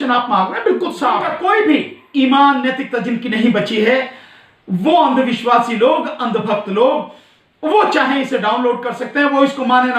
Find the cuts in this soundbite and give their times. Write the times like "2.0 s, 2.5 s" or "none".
1.3 s